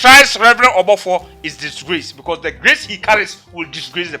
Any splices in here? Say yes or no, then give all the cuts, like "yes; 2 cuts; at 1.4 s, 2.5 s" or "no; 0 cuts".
no; 0 cuts